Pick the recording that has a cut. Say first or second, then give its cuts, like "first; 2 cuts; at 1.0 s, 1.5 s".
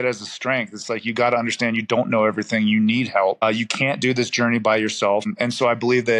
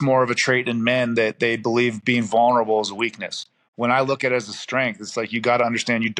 first; 2 cuts; at 3.4 s, 5.3 s